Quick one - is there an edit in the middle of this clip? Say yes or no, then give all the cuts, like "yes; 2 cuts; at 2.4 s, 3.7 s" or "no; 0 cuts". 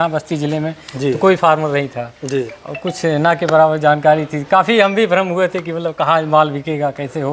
no; 0 cuts